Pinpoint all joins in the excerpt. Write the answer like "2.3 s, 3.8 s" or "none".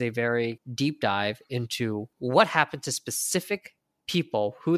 2.1 s